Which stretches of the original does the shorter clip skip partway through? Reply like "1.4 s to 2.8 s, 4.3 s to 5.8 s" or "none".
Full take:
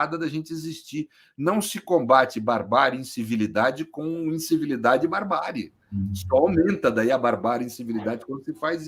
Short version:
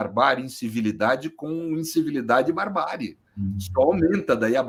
none